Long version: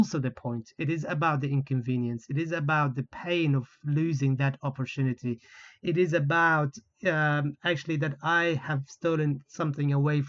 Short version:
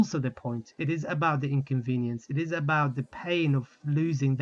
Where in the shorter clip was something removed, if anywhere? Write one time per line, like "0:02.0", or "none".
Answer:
none

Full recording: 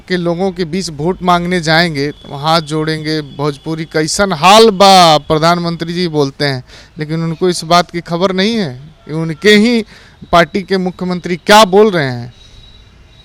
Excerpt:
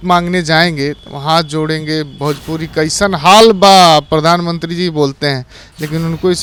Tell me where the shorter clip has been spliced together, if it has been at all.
none

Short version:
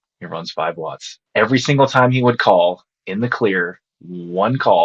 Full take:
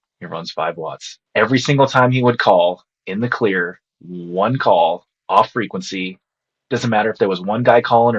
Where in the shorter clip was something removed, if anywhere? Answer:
none

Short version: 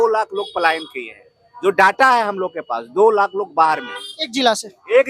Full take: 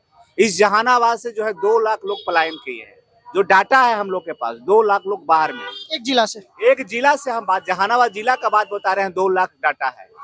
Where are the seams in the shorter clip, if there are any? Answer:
none

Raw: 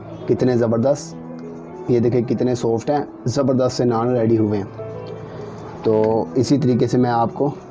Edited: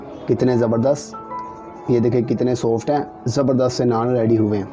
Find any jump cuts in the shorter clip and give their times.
none

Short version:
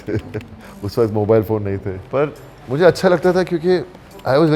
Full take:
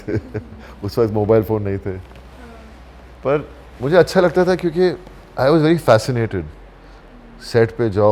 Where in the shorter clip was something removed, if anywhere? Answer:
0:01.9

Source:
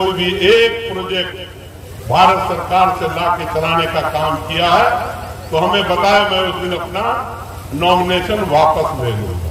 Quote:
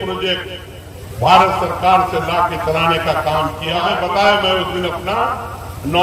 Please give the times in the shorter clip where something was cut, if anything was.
0:03.8

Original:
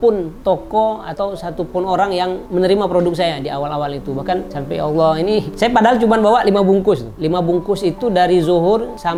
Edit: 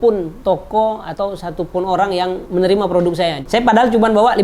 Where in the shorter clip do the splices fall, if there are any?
0:03.4

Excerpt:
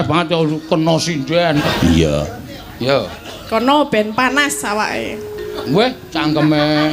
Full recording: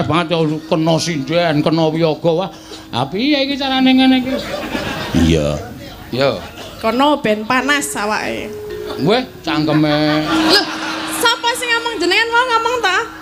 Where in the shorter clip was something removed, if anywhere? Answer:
0:01.6

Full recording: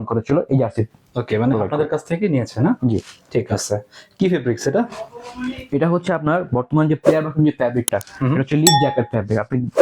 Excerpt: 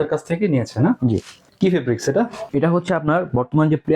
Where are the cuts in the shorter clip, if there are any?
0:01.4
0:02.4

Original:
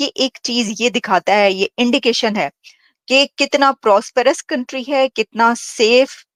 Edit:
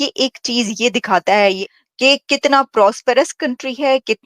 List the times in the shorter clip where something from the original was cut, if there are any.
0:01.6

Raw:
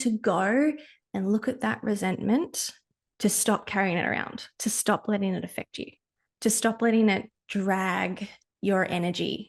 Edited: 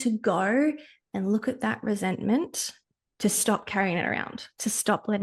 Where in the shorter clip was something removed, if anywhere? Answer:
none

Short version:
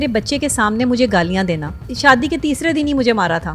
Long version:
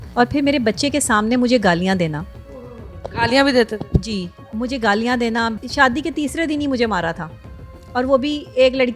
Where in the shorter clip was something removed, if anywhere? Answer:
0:01.9

